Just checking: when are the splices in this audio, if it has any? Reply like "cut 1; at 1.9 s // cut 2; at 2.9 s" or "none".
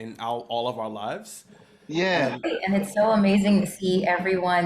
cut 1; at 2.5 s